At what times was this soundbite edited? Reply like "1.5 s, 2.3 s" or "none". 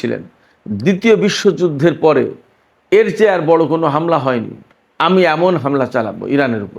none

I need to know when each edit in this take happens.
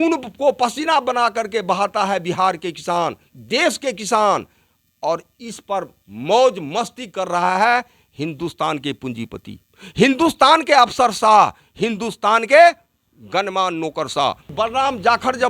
14.5 s

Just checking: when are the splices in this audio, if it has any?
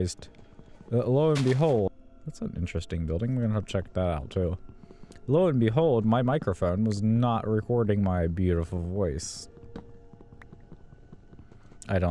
1.9 s

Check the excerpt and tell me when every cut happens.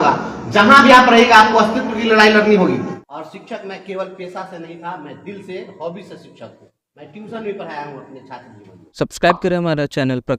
2.9 s, 8.9 s

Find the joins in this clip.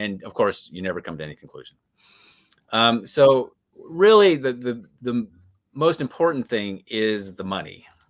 none

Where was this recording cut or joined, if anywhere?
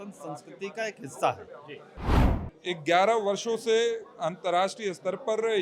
2.1 s

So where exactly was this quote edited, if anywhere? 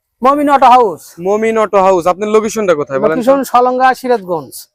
none

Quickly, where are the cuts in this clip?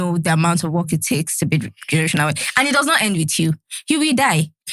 none

